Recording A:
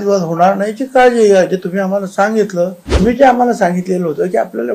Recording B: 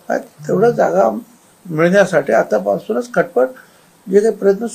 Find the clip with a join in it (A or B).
A